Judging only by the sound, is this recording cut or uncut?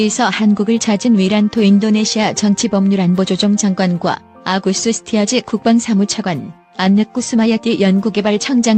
uncut